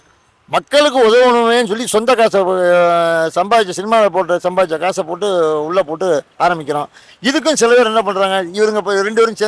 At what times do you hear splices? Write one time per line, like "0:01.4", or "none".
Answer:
none